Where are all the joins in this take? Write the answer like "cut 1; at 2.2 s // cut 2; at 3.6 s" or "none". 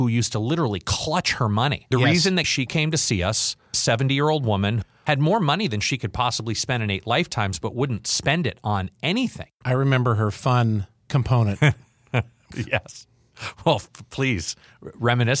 cut 1; at 1.8 s // cut 2; at 4.8 s // cut 3; at 9.5 s // cut 4; at 12.5 s